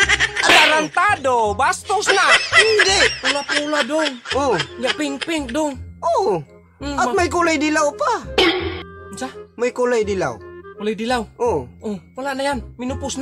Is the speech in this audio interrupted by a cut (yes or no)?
no